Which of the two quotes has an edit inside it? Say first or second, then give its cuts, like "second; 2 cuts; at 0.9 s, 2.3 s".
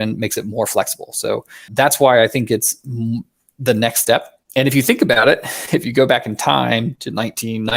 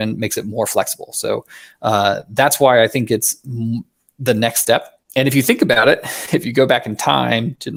first; 1 cut; at 1.7 s